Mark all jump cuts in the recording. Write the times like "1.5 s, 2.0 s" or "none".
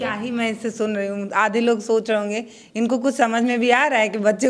none